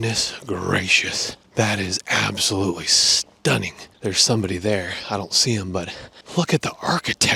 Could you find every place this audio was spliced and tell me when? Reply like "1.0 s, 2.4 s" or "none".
none